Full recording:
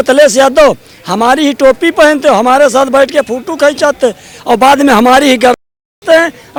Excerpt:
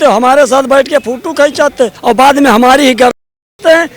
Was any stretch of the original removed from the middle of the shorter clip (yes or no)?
yes